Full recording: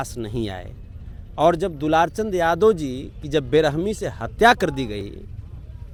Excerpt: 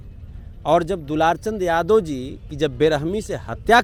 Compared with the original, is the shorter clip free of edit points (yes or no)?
yes